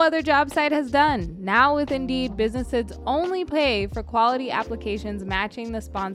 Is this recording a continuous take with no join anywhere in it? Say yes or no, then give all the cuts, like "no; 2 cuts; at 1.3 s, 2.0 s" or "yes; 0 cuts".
yes; 0 cuts